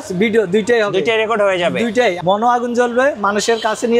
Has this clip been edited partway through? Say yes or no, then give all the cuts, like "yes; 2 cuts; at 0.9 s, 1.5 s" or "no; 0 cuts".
yes; 1 cut; at 2.2 s